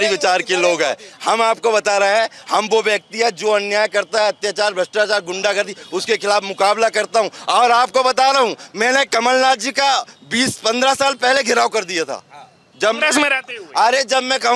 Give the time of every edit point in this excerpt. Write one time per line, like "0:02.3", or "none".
none